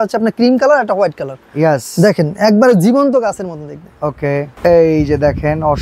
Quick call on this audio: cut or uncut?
uncut